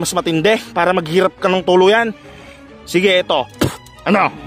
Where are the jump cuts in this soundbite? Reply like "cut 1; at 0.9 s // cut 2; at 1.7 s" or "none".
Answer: none